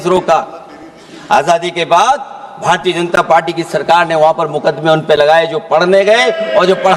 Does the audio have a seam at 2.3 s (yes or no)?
no